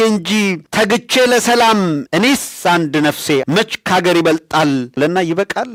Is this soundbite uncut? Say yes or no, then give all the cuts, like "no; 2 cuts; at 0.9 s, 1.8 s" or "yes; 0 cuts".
yes; 0 cuts